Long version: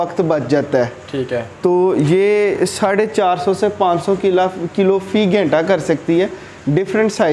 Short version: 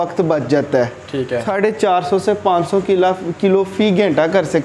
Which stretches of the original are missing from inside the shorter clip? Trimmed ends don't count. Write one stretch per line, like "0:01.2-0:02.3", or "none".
0:01.5-0:02.8